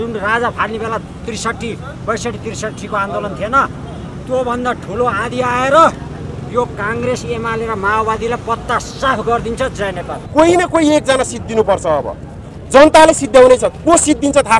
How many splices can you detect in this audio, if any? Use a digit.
1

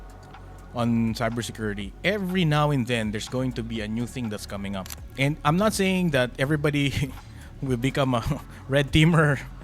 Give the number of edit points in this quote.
1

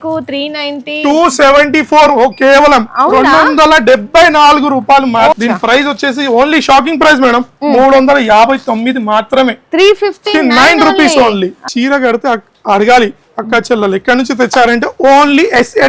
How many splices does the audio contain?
2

